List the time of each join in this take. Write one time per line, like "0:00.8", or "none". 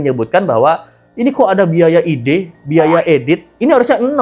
none